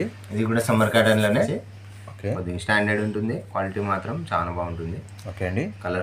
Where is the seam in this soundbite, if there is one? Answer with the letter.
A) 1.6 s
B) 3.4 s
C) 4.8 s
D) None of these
A